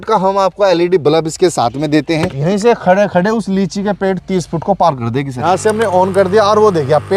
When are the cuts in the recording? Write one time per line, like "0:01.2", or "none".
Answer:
0:02.3
0:05.3